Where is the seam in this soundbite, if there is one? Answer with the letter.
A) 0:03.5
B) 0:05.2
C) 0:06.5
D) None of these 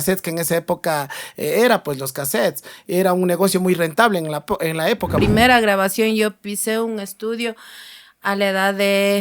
B